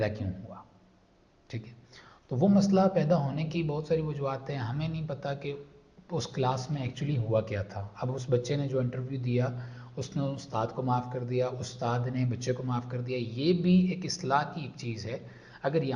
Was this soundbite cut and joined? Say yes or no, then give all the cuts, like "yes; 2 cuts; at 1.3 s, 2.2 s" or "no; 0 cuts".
no; 0 cuts